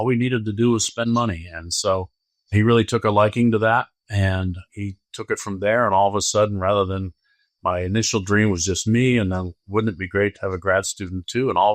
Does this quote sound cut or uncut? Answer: uncut